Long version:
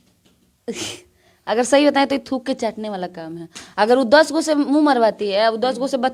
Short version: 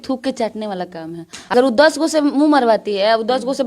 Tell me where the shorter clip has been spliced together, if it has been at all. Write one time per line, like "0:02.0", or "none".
0:01.5